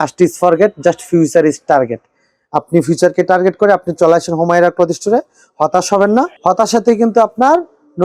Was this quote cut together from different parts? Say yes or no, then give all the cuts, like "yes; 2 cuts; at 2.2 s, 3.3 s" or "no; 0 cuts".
no; 0 cuts